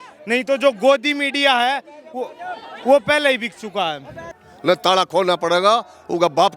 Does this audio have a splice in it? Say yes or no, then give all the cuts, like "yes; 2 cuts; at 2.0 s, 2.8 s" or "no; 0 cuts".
yes; 1 cut; at 4.2 s